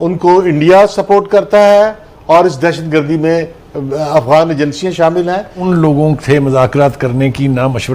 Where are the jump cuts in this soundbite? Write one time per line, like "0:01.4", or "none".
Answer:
0:05.6